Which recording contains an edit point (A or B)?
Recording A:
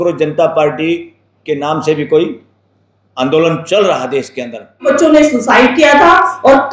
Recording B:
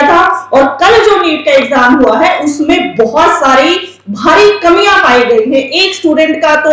A